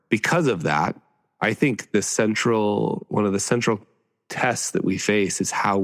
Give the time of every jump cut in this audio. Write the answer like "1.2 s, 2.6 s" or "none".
none